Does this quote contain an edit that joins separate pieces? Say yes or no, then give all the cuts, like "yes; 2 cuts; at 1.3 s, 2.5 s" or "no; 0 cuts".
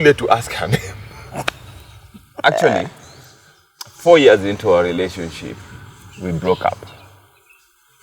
yes; 1 cut; at 2.4 s